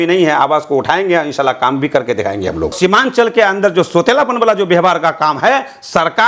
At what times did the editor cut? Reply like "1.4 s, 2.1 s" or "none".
2.7 s